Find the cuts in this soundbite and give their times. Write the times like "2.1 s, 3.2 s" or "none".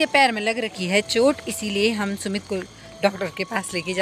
none